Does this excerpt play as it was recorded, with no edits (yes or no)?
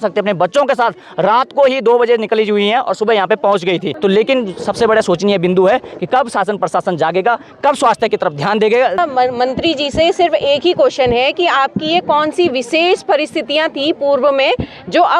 no